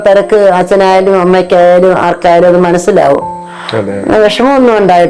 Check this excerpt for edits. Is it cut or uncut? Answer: uncut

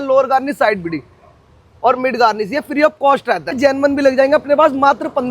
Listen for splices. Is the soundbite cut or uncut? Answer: cut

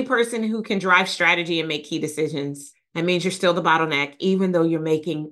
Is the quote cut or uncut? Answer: uncut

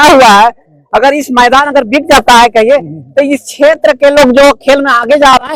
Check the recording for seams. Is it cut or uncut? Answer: uncut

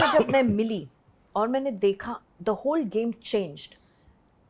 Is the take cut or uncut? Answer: uncut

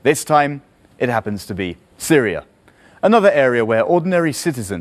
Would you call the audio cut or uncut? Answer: cut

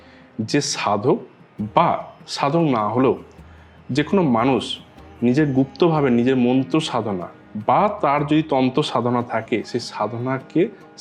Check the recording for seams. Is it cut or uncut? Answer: uncut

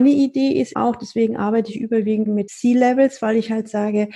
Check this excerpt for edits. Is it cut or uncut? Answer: cut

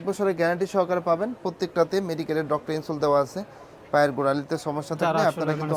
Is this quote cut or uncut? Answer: uncut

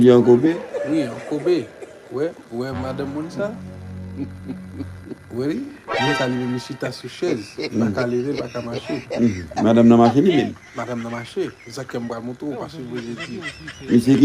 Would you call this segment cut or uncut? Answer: uncut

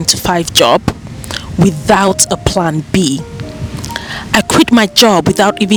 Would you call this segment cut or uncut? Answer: uncut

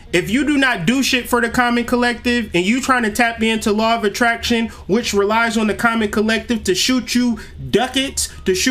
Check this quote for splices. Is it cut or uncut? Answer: uncut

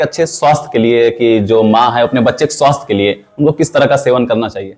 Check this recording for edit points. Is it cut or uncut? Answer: uncut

